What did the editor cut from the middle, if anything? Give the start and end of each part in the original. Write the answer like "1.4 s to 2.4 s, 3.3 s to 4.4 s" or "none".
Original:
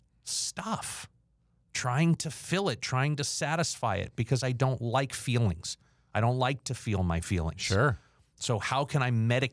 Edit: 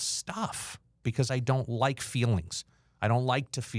1.3 s to 4.1 s